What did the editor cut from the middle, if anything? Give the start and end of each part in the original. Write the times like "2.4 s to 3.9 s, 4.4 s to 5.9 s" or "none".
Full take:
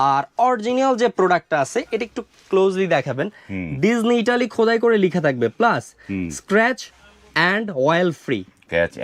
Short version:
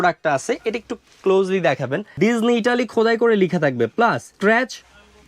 3.3 s to 3.7 s, 5.9 s to 6.4 s